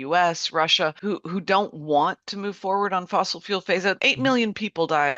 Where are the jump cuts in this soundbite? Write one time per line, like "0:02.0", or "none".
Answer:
0:01.0
0:04.0

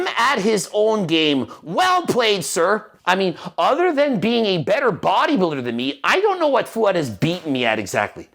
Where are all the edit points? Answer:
0:02.9

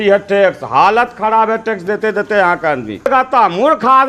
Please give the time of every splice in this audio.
0:03.1

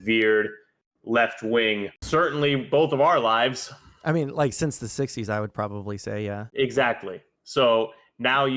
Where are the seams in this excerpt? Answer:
0:02.0
0:06.4

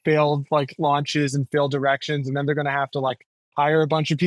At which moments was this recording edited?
none

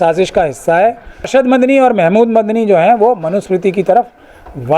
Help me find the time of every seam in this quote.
0:01.3

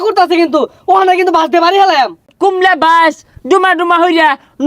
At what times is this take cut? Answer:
0:02.3

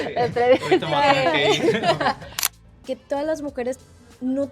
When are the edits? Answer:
0:02.5

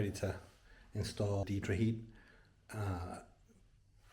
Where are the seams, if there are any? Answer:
0:01.4

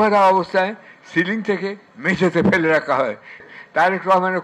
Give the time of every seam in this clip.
0:03.5

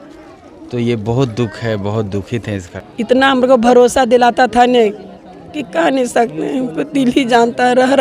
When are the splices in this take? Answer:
0:02.7

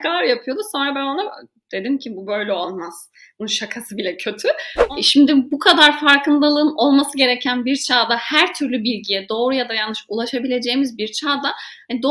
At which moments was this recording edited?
0:04.7

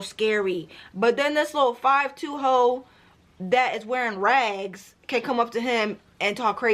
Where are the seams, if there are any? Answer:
none

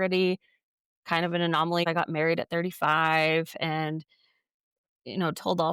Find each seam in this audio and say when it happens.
0:01.9

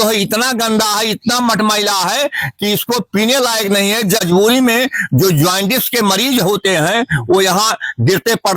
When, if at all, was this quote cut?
0:04.2

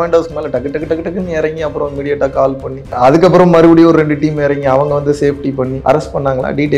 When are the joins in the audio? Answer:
0:02.9
0:05.8

